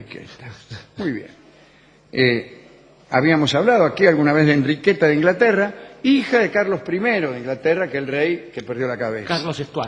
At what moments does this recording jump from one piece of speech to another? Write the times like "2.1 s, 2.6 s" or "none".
2.0 s